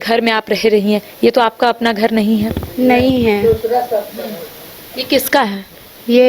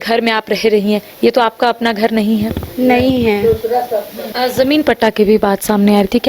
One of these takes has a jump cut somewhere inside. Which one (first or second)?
second